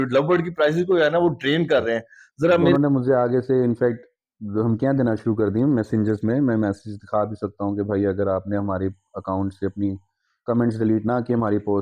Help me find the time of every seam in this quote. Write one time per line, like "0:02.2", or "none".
0:02.7